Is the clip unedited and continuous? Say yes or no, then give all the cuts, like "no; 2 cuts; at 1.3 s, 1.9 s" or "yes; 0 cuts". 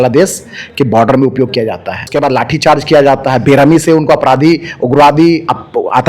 no; 1 cut; at 2.1 s